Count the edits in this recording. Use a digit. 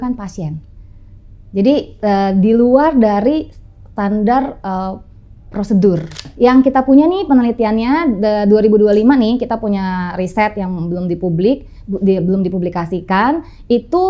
1